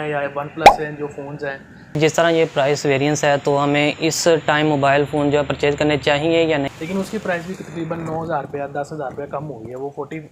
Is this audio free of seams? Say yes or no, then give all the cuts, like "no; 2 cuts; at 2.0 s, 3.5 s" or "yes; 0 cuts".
no; 2 cuts; at 2.0 s, 6.7 s